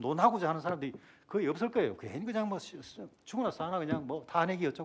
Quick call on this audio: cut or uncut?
uncut